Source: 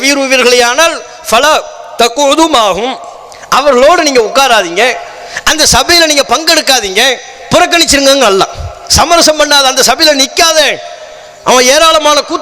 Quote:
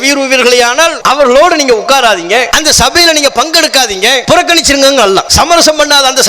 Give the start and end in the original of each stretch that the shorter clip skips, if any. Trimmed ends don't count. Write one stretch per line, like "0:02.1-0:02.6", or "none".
0:01.0-0:03.5
0:05.0-0:05.5
0:07.1-0:07.4
0:08.5-0:08.9